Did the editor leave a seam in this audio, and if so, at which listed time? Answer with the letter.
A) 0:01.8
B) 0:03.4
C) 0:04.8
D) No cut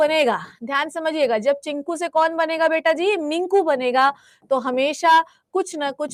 D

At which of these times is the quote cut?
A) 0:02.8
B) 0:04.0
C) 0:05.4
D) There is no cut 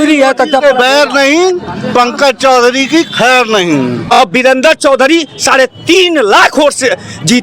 B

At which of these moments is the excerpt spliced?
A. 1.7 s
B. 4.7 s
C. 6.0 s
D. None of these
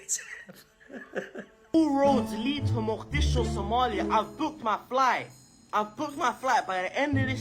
A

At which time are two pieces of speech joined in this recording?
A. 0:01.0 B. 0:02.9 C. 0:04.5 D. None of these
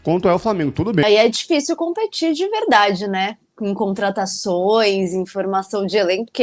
A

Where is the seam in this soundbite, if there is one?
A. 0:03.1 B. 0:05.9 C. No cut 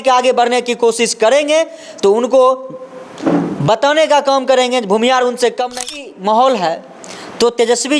B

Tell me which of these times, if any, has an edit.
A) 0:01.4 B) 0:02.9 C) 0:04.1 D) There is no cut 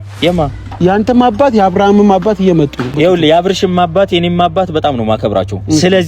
B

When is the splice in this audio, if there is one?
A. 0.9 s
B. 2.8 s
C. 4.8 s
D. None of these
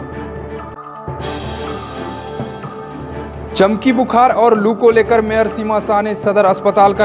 B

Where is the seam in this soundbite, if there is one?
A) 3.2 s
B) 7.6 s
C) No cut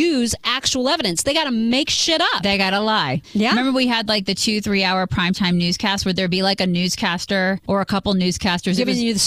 A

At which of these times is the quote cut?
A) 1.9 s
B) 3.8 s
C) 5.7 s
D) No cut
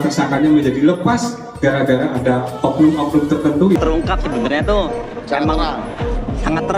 B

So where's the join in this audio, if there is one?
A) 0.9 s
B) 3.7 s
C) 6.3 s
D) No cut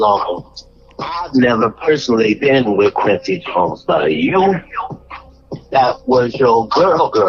D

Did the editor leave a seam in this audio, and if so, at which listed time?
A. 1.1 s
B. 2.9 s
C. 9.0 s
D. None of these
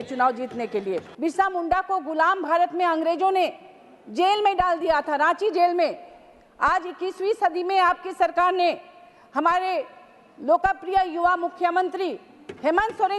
A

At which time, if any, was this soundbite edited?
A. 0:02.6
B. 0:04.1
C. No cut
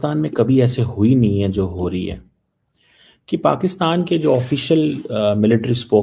C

